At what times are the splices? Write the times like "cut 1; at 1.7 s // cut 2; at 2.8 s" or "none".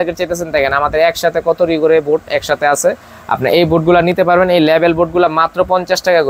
none